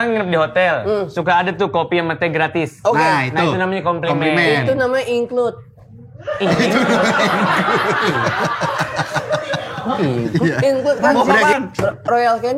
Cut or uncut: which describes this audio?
cut